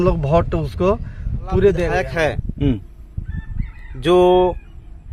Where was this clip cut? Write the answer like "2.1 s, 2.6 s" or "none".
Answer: 2.0 s